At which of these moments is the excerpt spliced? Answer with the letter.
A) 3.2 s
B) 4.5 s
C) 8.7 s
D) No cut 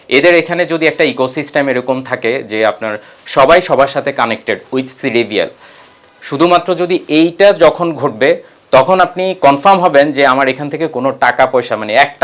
D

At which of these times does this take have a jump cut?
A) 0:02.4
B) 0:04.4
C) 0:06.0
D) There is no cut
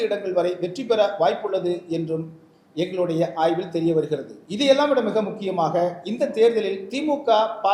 B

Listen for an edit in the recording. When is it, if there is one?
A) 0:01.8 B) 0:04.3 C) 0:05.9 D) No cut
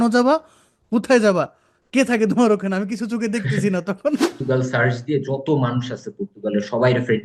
B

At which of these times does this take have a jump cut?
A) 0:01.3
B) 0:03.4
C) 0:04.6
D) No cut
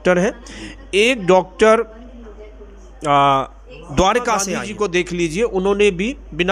C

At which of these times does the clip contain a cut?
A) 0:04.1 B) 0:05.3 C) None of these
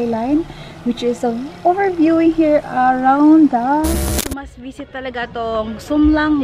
A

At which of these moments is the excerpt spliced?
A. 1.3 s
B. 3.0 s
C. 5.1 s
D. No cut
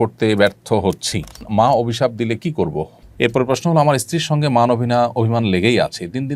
B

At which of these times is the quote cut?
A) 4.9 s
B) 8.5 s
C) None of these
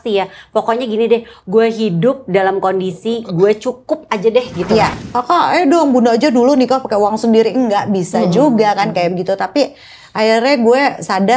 A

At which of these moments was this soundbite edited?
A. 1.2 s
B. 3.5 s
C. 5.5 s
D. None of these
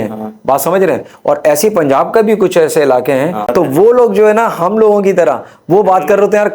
B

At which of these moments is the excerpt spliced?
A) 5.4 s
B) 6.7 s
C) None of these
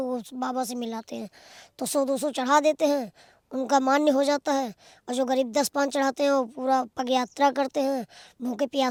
C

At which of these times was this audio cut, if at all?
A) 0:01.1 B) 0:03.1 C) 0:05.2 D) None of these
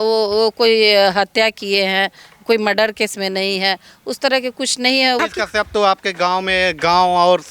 C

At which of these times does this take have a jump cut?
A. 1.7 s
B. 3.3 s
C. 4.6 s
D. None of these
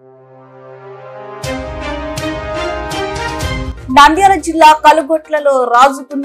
B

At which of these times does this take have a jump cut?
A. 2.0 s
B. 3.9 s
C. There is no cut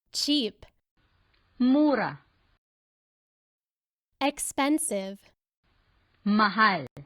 A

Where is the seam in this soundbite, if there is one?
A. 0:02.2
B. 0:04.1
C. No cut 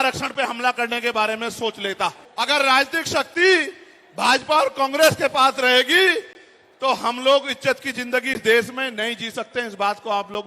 A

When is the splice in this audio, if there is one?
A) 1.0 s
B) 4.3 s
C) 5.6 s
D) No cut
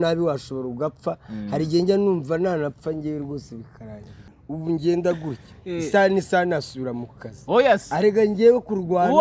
B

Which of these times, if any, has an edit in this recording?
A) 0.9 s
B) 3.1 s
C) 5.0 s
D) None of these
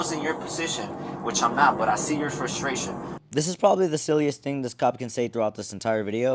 D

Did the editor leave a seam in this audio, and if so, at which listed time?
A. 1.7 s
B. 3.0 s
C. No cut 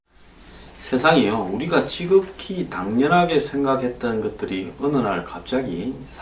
C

